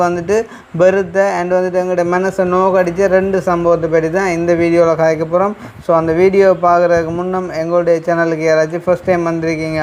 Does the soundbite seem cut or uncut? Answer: uncut